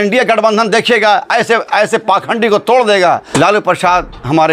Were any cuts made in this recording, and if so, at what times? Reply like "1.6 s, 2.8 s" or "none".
3.3 s